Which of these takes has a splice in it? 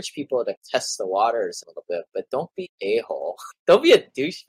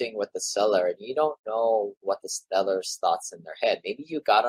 first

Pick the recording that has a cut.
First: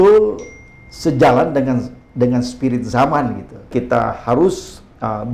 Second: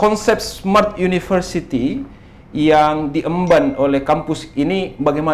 first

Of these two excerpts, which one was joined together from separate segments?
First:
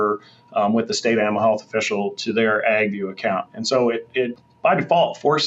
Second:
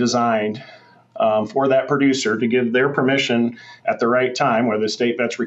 first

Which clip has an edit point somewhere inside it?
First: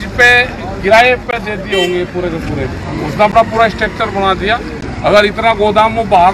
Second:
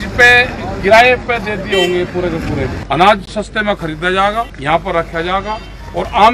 second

